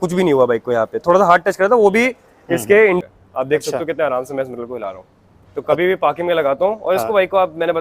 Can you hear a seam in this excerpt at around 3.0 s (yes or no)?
yes